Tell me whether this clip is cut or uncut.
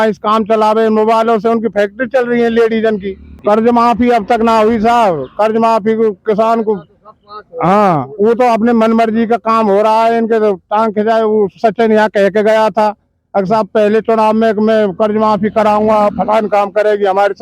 cut